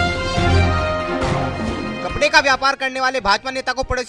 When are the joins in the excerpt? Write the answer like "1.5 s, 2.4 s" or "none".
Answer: 1.6 s